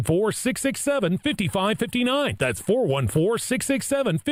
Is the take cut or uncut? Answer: uncut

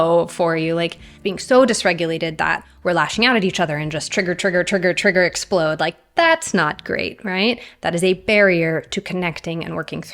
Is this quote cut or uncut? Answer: cut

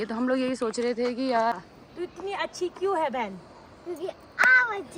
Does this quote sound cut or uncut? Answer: cut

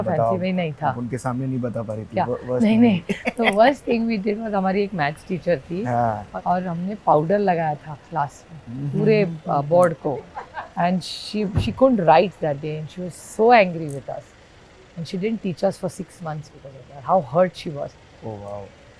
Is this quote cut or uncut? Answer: cut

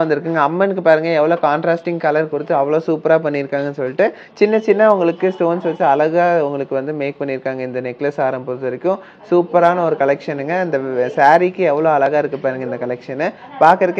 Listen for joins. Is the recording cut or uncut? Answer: uncut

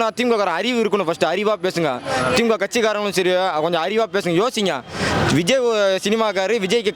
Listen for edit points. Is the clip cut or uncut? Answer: uncut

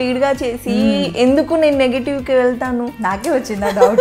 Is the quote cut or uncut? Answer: uncut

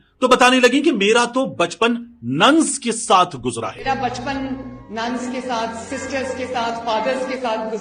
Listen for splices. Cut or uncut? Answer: uncut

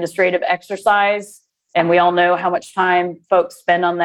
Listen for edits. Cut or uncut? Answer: uncut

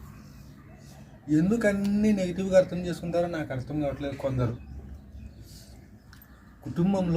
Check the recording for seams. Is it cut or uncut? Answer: cut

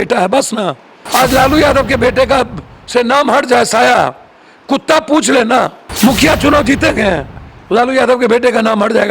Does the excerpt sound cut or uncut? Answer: cut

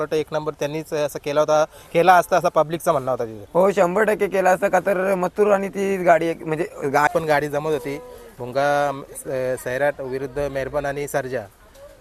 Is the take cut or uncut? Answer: cut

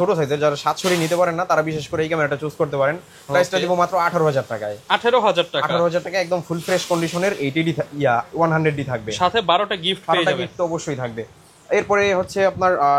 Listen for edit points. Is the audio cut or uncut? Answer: uncut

